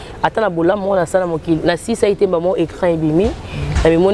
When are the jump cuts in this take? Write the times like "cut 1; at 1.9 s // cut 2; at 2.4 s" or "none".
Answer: none